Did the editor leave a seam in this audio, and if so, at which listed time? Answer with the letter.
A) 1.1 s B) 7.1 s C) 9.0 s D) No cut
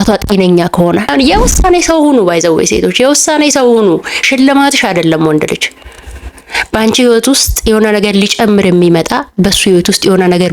A